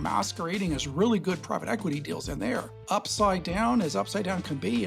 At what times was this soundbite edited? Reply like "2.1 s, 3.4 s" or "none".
2.5 s